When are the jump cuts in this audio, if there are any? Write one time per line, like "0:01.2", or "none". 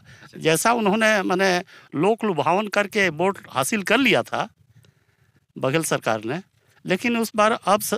none